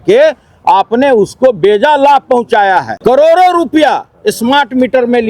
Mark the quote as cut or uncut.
cut